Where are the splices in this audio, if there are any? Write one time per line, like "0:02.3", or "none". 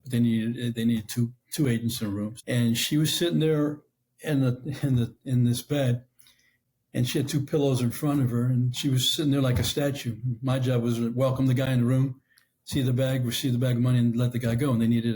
0:02.4